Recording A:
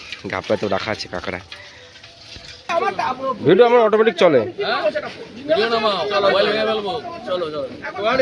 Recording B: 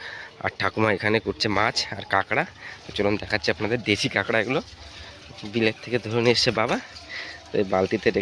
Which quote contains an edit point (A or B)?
A